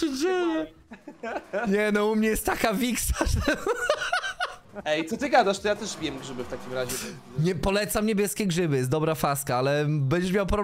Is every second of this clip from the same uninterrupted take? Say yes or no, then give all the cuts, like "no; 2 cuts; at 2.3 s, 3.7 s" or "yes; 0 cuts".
yes; 0 cuts